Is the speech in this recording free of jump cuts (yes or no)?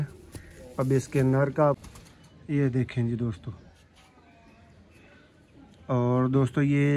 no